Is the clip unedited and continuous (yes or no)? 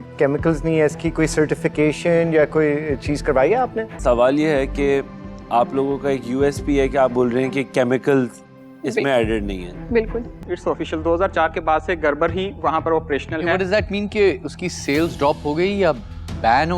no